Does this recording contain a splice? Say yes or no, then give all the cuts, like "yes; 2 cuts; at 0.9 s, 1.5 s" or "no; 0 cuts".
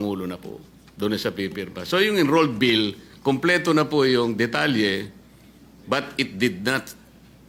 no; 0 cuts